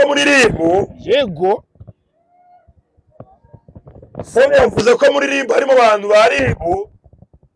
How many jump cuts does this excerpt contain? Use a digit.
0